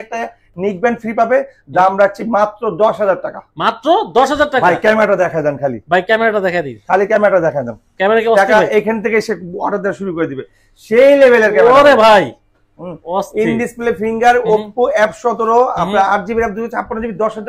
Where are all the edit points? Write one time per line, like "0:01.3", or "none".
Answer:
none